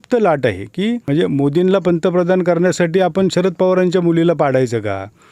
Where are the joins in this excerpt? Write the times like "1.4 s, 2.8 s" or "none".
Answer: 1.0 s